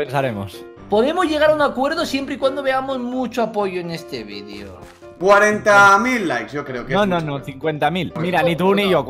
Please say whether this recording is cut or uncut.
cut